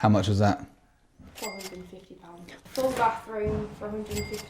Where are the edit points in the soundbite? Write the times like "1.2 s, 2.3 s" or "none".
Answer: 2.7 s